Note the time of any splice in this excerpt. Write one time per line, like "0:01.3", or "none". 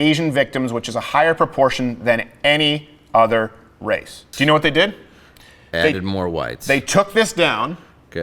0:04.2

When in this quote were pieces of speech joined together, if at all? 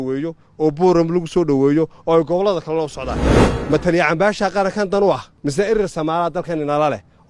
0:05.3

